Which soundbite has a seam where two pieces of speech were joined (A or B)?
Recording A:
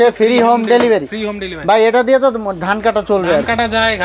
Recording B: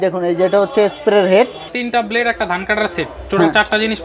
B